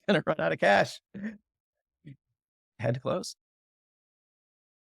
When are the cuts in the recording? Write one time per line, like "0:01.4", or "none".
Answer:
none